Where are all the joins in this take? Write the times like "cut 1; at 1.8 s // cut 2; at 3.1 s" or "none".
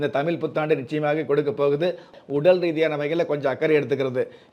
cut 1; at 2.1 s

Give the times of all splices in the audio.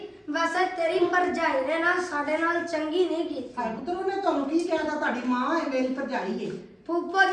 none

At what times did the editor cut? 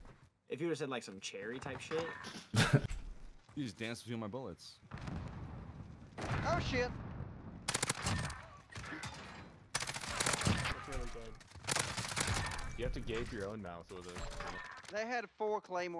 none

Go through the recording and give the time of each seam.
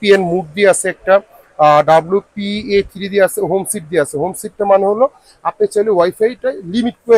none

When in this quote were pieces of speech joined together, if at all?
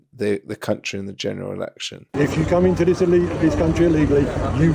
cut 1; at 2.0 s

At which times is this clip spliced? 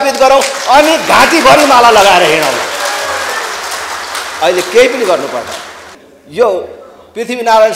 none

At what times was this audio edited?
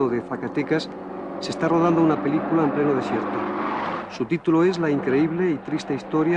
cut 1; at 4.7 s

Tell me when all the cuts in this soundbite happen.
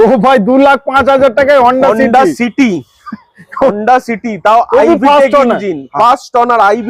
none

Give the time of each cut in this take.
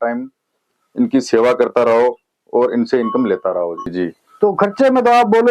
cut 1; at 3.9 s

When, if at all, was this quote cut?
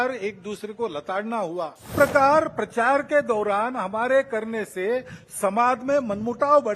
cut 1; at 1.9 s

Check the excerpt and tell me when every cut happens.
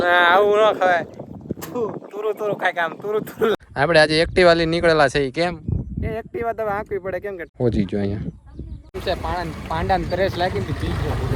cut 1; at 3.6 s // cut 2; at 7.5 s // cut 3; at 9.0 s

